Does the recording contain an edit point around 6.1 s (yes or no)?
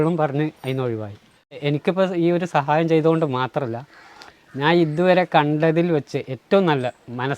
no